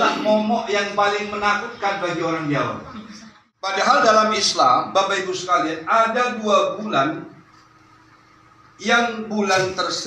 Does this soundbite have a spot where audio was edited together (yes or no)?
yes